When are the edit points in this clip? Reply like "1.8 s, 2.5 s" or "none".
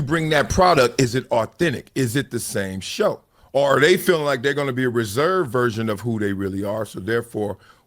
3.3 s